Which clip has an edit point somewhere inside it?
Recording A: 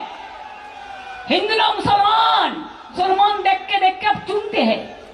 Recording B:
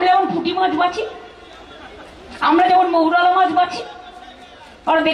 A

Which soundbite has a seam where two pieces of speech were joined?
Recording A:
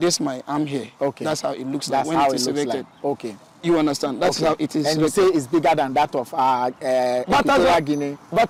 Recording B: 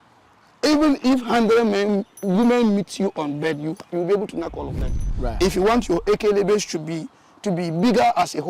B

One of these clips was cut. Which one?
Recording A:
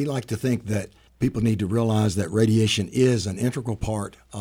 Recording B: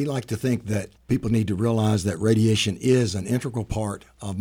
B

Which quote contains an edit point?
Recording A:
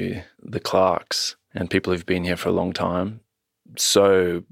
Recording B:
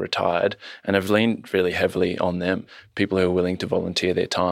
B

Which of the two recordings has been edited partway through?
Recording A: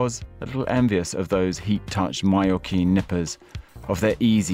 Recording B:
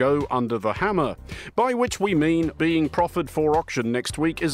B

